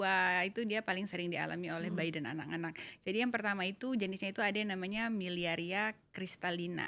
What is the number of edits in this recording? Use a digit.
0